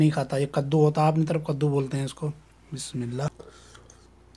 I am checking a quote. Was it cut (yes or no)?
yes